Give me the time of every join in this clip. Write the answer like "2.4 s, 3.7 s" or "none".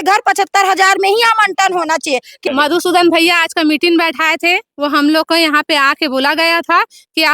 2.4 s